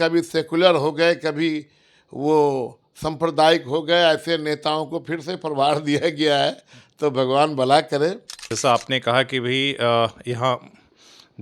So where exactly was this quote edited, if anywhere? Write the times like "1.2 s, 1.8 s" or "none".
8.5 s